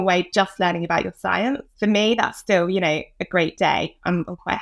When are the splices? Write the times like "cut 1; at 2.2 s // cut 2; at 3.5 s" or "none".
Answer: cut 1; at 1.7 s